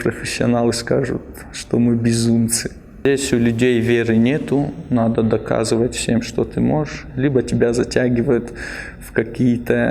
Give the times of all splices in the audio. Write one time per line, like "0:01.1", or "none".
0:03.0